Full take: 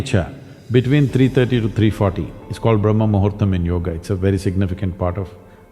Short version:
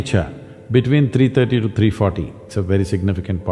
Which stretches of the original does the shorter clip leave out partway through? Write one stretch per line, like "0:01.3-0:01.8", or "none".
0:02.4-0:04.0